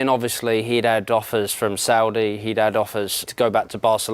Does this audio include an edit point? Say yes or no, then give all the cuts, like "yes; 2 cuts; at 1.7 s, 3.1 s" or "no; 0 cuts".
yes; 1 cut; at 3.2 s